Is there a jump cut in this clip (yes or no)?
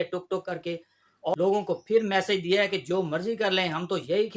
yes